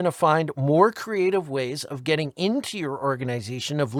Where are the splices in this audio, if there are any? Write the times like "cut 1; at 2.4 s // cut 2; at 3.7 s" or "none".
none